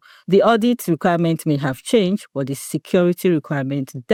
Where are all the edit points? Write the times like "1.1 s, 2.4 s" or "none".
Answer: none